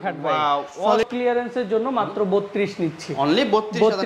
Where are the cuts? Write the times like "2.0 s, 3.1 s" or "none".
1.1 s